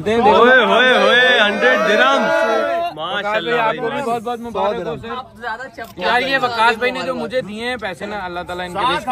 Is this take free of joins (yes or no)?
yes